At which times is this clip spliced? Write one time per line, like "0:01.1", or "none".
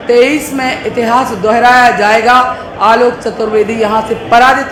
none